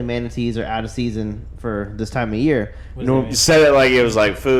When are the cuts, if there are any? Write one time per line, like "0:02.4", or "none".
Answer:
none